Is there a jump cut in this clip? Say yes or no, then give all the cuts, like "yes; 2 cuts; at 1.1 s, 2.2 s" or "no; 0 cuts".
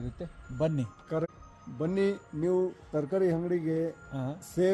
yes; 1 cut; at 1.4 s